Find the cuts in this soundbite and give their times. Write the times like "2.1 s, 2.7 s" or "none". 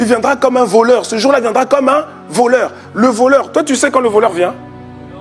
2.8 s